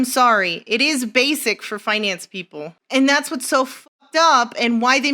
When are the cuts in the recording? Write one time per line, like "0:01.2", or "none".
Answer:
0:02.8

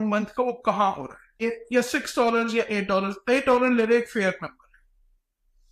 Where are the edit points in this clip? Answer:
0:01.4

